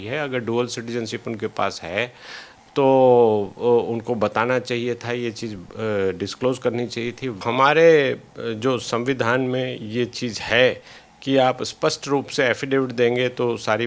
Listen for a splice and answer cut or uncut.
cut